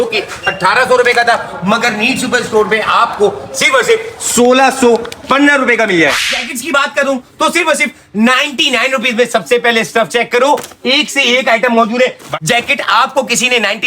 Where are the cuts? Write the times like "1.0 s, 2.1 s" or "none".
6.2 s, 12.3 s